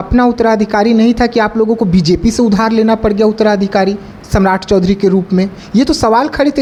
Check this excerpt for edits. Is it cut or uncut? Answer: uncut